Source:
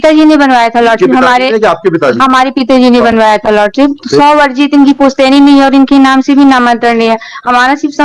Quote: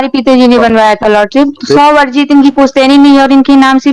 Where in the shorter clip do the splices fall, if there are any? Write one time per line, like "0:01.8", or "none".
none